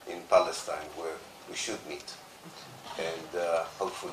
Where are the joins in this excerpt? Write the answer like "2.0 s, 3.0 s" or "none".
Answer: none